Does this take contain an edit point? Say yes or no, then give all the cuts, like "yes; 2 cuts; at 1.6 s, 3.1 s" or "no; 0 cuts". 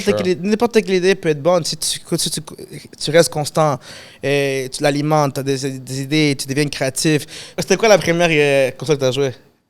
yes; 1 cut; at 7.6 s